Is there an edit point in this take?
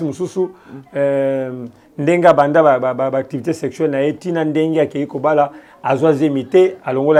no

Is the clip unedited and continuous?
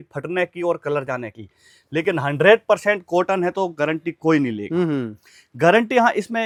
yes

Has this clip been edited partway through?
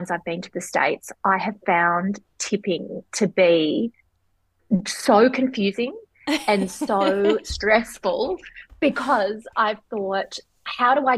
no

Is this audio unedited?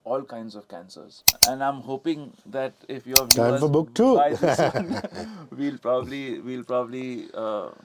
no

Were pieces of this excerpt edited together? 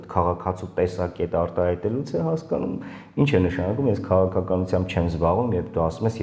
no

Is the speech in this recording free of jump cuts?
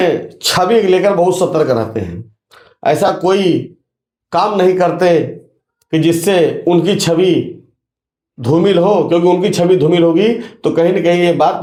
yes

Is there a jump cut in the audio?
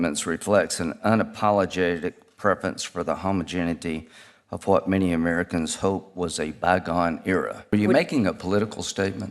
yes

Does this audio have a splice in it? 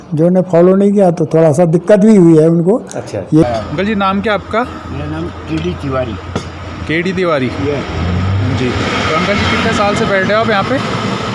yes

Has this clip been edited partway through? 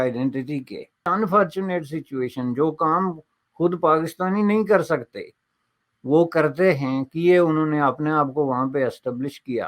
yes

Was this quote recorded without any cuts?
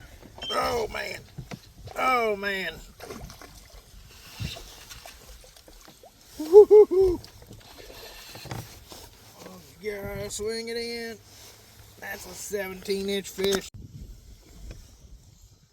no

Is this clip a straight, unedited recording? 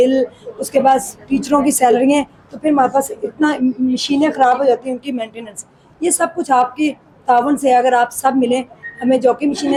yes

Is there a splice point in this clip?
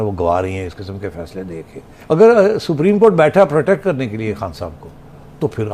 yes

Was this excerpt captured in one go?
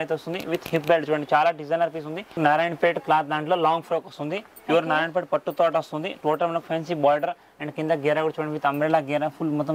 no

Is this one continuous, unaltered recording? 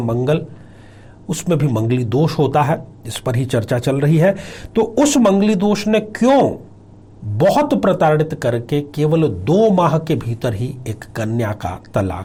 yes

